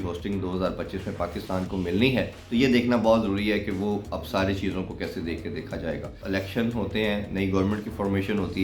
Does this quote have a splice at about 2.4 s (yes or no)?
yes